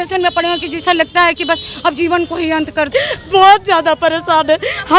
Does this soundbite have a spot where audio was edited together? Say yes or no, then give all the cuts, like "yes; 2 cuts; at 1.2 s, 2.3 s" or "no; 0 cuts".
yes; 1 cut; at 2.9 s